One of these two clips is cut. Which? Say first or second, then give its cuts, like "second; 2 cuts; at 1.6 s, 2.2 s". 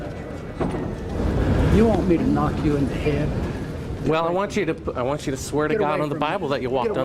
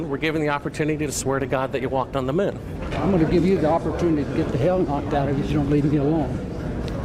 first; 1 cut; at 1.1 s